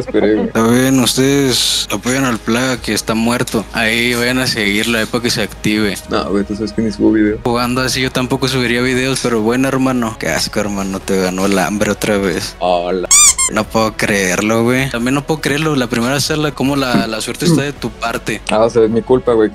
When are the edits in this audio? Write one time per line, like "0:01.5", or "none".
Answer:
0:06.0
0:10.1
0:14.9